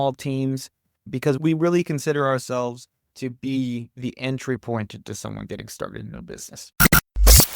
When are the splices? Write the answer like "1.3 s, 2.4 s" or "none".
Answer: 6.6 s